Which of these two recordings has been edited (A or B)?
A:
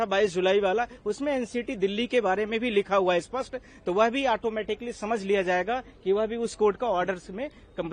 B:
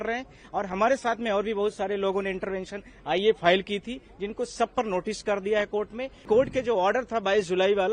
B